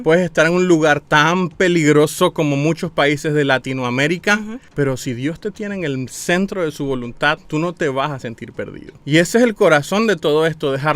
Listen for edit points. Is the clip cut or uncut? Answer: cut